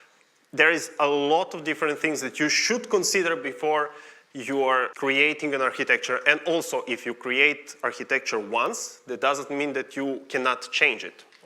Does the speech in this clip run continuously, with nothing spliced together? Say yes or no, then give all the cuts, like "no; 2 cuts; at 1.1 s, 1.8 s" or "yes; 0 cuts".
no; 1 cut; at 4.9 s